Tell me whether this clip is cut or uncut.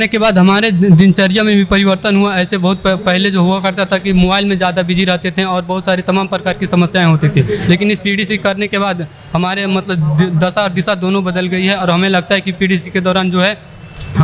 uncut